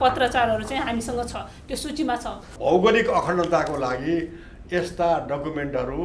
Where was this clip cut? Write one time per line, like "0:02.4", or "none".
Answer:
0:02.5